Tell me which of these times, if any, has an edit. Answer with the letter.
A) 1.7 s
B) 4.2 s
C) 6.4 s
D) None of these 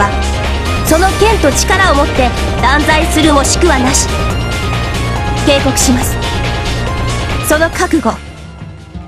B